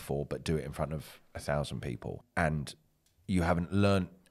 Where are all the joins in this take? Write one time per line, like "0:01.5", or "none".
0:02.2